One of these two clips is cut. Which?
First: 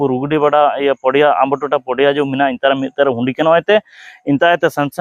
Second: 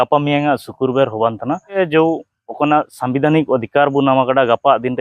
second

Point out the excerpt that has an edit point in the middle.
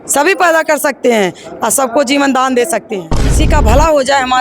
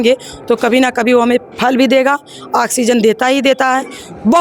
first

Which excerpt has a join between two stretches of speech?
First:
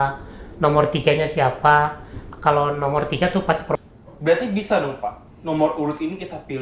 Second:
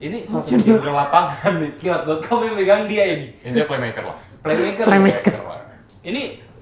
first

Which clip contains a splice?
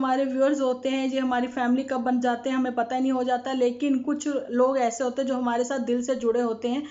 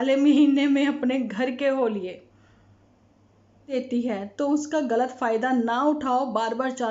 second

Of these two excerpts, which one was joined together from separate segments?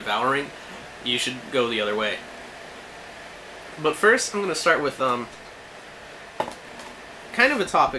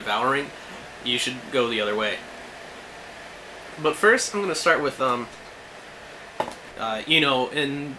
first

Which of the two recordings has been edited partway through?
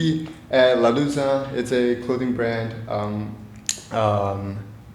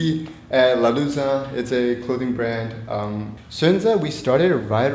second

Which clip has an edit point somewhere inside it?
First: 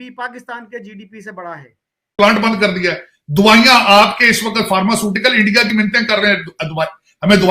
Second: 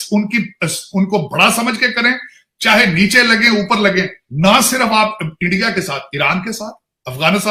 first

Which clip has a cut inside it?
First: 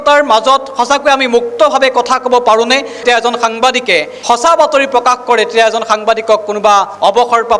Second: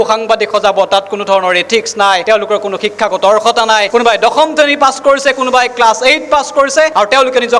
first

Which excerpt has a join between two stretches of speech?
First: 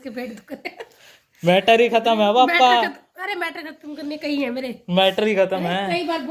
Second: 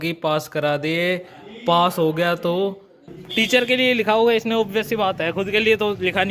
second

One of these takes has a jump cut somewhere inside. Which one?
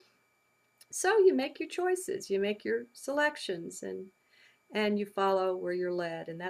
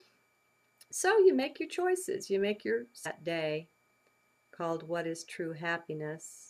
first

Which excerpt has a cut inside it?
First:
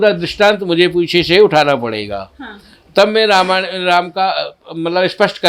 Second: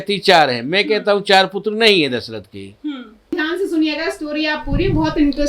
second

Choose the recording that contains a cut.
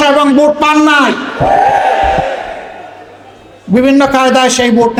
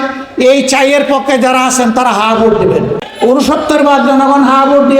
second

